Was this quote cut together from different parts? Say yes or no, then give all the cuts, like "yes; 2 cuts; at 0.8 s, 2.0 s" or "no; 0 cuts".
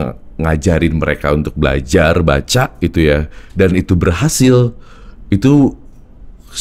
no; 0 cuts